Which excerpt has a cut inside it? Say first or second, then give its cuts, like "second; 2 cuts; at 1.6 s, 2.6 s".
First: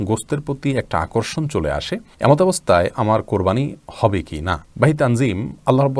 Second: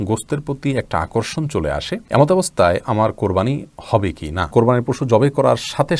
second; 2 cuts; at 2.0 s, 4.5 s